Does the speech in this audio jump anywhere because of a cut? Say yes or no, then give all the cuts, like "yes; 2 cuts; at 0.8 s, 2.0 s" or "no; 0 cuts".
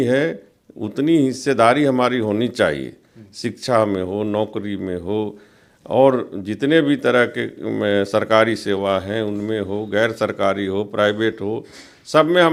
no; 0 cuts